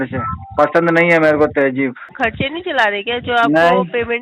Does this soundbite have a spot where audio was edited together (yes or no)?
yes